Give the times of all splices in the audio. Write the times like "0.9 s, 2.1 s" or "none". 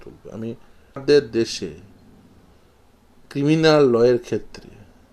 1.0 s